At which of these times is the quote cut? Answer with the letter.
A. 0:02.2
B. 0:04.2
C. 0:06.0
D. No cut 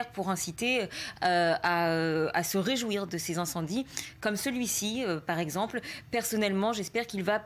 D